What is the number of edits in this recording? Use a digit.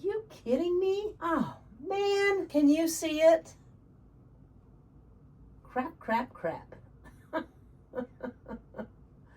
3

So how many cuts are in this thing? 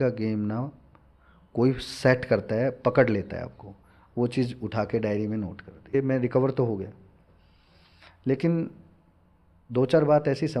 1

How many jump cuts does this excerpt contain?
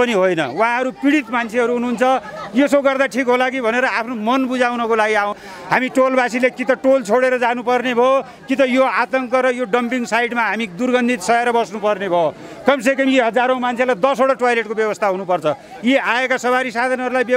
1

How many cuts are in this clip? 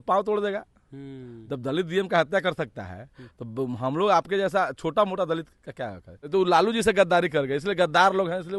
1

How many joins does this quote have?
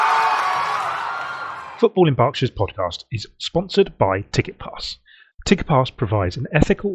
1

